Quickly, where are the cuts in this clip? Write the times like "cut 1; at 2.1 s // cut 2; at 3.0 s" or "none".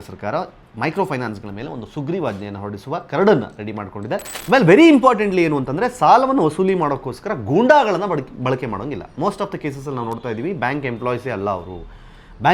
cut 1; at 4.3 s